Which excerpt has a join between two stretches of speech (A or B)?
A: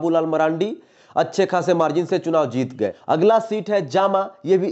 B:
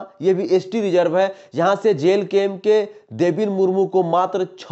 A